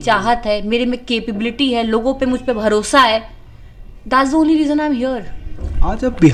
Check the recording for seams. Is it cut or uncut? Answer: uncut